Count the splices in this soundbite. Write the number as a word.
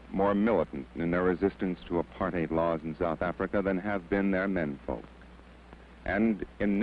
one